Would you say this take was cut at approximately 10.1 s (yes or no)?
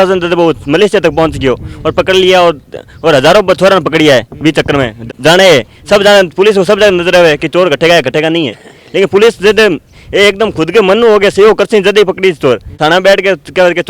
no